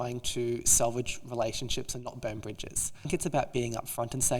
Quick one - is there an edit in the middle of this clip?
yes; 1 cut; at 3.1 s

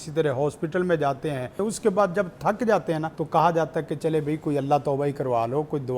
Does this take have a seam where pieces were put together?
yes; 2 cuts; at 1.5 s, 3.1 s

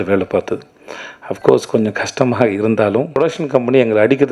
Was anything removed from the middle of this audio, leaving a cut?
yes; 1 cut; at 3.1 s

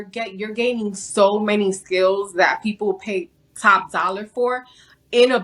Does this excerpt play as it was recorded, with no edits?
yes; 0 cuts

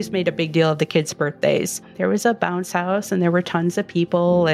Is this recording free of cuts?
no; 1 cut; at 1.8 s

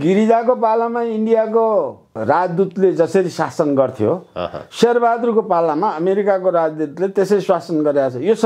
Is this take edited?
no; 0 cuts

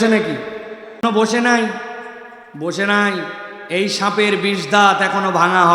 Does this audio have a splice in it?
yes; 1 cut; at 1.0 s

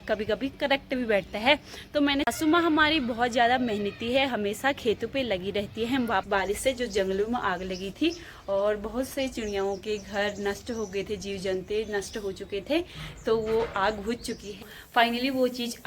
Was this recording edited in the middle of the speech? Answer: yes; 3 cuts; at 2.3 s, 6.2 s, 14.7 s

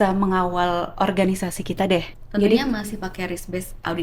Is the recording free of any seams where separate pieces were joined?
no; 1 cut; at 2.1 s

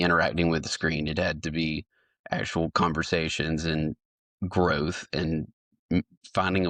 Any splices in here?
no; 0 cuts

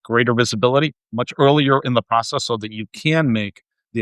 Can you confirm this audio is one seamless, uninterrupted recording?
no; 1 cut; at 1.0 s

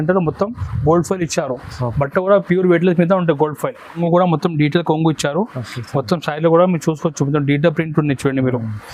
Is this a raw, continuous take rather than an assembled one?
no; 1 cut; at 4.0 s

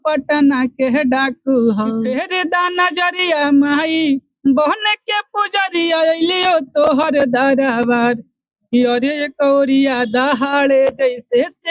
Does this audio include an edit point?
yes; 1 cut; at 2.2 s

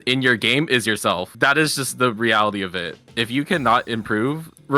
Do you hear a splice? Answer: yes; 1 cut; at 1.3 s

